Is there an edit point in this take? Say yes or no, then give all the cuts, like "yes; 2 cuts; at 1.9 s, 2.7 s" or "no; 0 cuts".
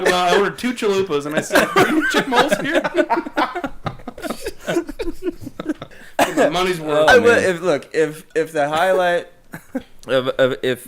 yes; 1 cut; at 5.9 s